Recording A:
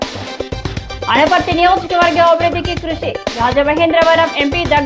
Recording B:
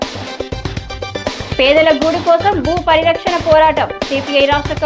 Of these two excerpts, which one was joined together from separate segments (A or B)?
A